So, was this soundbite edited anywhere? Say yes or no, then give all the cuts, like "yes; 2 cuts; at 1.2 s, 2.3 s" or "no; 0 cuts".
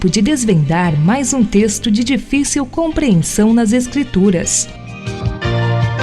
yes; 1 cut; at 4.6 s